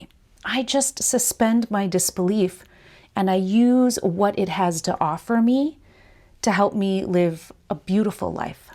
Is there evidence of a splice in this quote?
no; 0 cuts

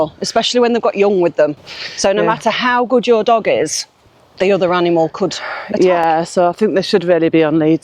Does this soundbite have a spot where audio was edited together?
no; 0 cuts

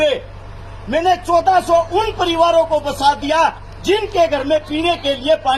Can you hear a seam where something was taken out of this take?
no; 0 cuts

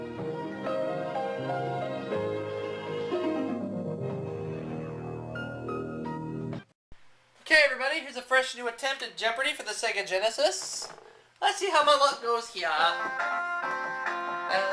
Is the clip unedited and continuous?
no; 1 cut; at 9.6 s

